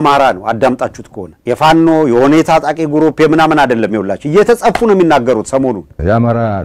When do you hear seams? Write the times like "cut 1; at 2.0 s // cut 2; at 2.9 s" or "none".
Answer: none